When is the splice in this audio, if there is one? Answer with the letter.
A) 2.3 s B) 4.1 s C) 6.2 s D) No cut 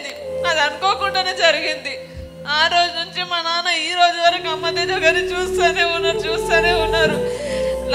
D